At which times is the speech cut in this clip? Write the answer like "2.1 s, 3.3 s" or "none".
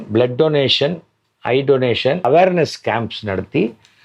2.2 s